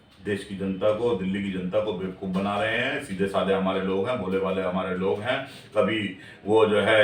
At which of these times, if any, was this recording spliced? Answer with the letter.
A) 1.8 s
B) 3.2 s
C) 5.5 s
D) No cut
D